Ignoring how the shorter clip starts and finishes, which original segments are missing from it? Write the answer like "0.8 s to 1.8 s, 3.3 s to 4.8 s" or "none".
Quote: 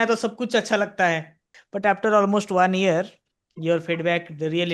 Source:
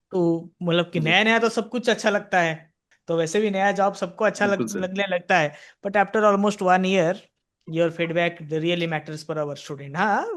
2.9 s to 5.7 s